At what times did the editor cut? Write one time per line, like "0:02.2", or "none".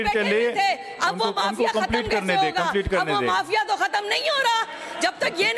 none